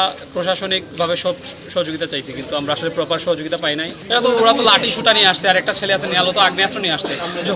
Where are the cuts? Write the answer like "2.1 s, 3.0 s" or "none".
4.0 s